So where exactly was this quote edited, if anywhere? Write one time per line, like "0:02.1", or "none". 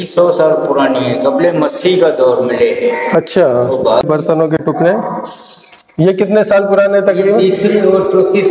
0:04.0